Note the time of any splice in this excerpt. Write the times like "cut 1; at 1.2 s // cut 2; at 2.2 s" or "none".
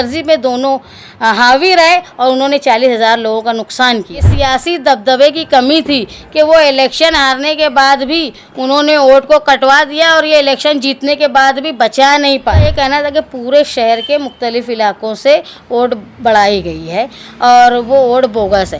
cut 1; at 4.3 s // cut 2; at 12.7 s